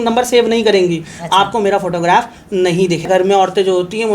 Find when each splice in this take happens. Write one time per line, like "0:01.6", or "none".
0:03.1